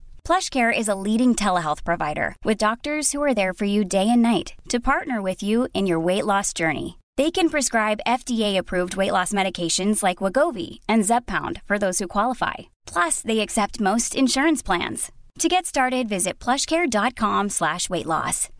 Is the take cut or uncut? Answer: uncut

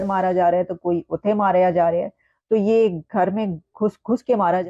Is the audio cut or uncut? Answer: uncut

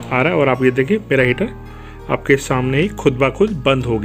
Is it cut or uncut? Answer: uncut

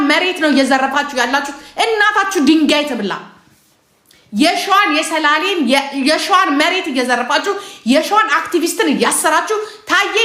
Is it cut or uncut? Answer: uncut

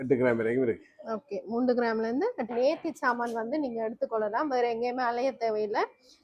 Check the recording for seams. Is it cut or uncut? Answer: cut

